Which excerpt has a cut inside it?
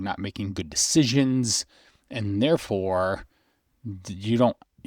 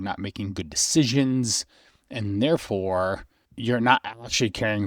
second; 1 cut; at 3.5 s

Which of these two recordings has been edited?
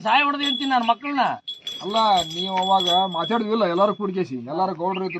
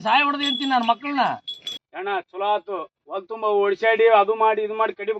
second; 1 cut; at 1.8 s

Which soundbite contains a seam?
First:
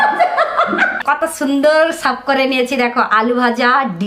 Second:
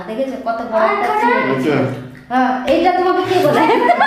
first; 1 cut; at 1.0 s

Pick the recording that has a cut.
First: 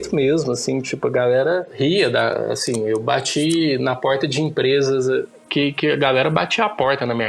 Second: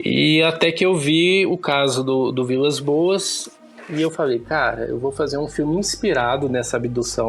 first; 1 cut; at 1.7 s

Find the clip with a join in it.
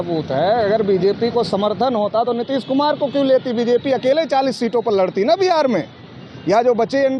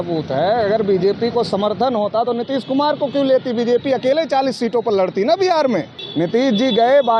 second; 1 cut; at 6.0 s

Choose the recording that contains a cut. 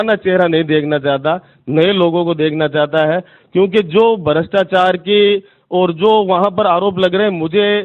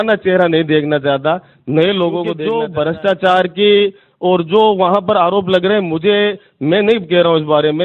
second; 1 cut; at 2.4 s

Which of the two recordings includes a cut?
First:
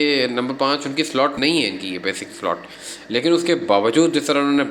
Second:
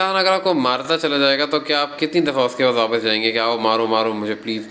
first; 1 cut; at 1.3 s

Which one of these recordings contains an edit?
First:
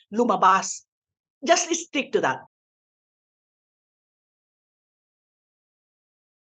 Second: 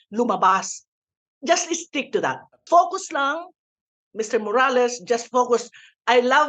second; 1 cut; at 2.5 s

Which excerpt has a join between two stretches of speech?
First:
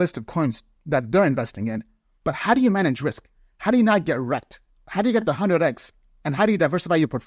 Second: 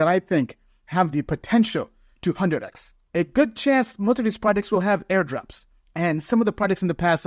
second; 1 cut; at 2.9 s

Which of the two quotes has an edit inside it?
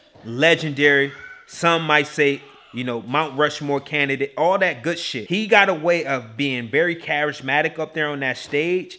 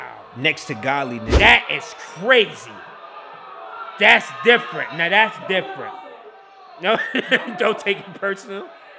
first; 1 cut; at 5.1 s

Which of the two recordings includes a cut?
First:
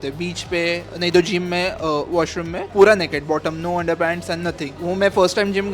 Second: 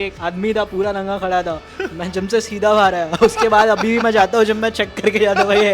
first; 2 cuts; at 2.6 s, 4.7 s

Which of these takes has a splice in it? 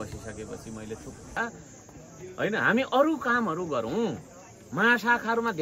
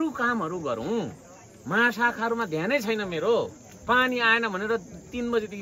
first; 1 cut; at 1.4 s

